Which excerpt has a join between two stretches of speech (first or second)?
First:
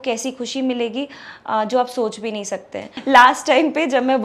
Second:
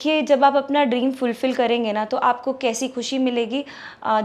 first